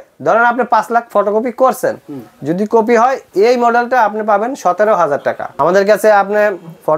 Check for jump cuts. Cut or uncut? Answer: cut